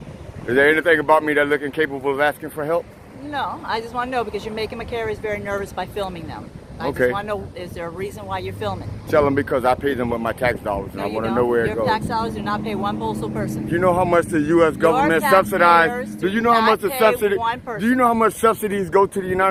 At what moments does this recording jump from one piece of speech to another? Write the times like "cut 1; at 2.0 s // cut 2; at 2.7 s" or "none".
none